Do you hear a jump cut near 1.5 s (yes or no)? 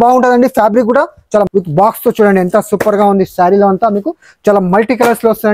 yes